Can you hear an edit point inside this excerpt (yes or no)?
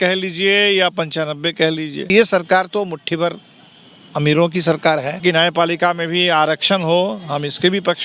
yes